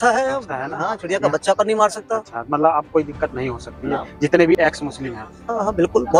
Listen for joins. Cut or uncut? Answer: uncut